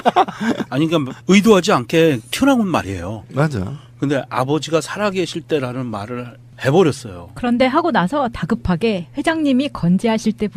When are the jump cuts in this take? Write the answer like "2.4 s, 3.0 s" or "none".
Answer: none